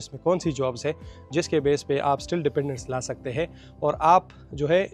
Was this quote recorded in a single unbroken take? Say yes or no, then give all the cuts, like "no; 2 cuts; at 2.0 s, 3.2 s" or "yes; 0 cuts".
yes; 0 cuts